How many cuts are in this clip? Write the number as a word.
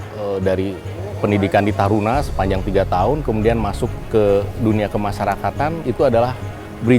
one